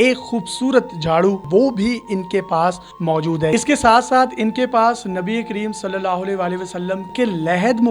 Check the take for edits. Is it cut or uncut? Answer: cut